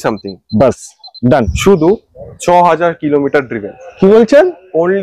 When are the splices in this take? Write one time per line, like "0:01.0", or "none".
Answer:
0:01.5